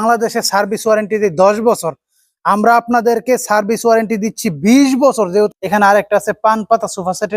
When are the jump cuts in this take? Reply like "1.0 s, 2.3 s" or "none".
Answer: 5.5 s